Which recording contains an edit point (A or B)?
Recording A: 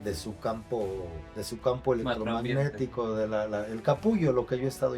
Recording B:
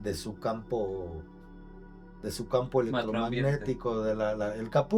A